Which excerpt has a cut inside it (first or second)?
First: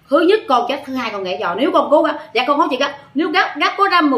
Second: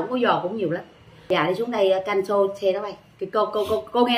second